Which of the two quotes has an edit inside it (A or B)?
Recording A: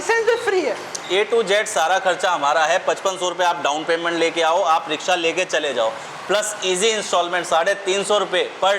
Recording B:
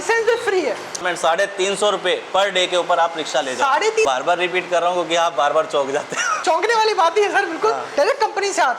B